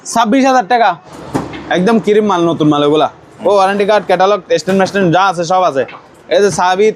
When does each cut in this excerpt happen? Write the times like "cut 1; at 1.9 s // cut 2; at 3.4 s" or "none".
cut 1; at 1.1 s